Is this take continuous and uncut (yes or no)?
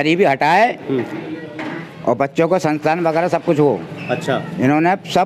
yes